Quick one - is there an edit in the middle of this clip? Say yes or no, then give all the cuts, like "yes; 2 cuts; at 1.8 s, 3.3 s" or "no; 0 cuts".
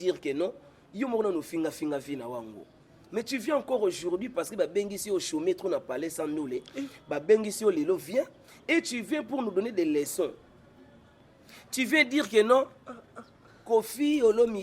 no; 0 cuts